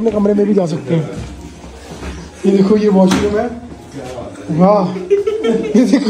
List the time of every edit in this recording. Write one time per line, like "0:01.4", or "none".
none